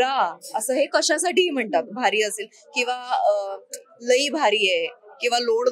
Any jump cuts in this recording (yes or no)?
no